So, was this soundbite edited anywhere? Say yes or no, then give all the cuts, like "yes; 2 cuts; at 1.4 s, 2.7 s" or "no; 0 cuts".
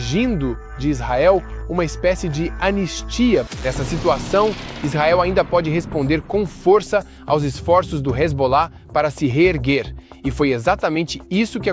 yes; 1 cut; at 3.5 s